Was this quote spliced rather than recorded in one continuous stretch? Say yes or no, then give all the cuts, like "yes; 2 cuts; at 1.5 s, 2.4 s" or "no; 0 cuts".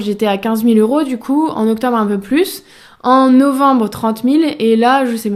no; 0 cuts